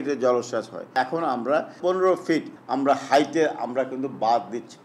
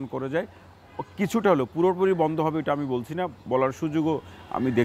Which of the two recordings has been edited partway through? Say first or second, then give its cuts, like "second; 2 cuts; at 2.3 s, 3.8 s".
first; 3 cuts; at 0.9 s, 1.8 s, 2.6 s